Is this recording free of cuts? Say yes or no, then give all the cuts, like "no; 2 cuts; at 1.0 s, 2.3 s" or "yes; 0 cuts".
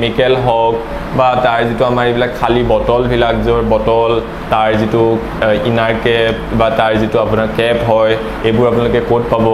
yes; 0 cuts